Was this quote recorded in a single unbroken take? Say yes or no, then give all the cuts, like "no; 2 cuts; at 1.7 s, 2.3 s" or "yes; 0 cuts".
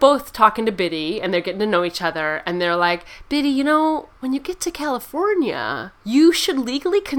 yes; 0 cuts